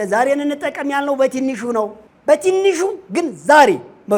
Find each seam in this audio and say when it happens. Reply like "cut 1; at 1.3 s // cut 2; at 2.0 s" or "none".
cut 1; at 2.1 s